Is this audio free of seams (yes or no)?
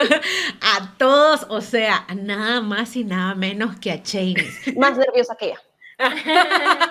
no